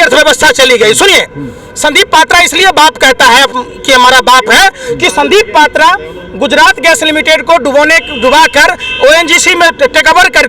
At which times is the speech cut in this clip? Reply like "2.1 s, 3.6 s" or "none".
none